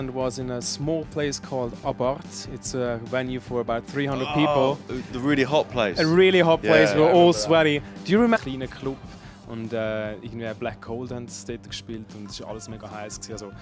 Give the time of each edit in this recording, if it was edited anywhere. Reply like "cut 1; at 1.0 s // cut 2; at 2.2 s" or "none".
none